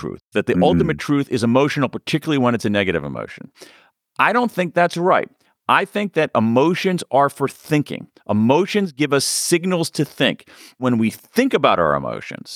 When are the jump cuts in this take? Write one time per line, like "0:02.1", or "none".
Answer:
0:10.8